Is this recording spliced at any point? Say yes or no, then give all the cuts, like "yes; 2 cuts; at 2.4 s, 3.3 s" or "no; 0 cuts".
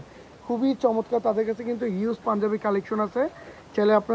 no; 0 cuts